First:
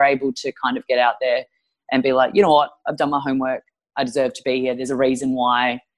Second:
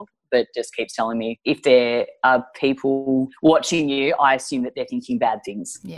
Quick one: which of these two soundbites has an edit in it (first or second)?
second